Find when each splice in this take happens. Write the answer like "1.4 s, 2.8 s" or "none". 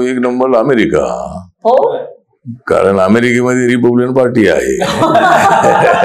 none